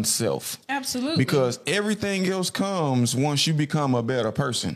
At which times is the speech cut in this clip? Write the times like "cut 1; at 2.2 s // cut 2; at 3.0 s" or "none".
none